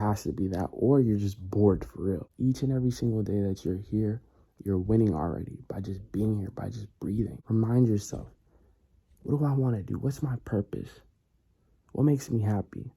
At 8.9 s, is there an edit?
no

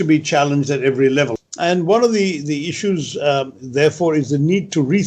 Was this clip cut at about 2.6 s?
no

